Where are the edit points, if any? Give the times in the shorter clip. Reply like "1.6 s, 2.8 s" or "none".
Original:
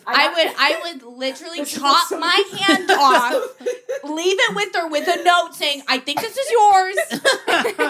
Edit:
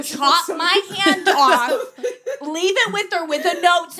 none